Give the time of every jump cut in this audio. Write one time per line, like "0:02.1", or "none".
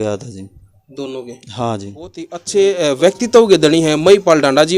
0:02.4